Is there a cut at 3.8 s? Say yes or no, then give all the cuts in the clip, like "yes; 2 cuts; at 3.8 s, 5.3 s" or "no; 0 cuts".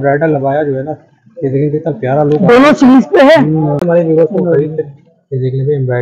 yes; 1 cut; at 3.8 s